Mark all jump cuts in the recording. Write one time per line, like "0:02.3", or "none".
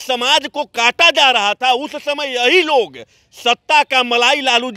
none